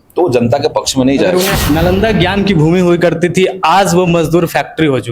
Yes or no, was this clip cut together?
yes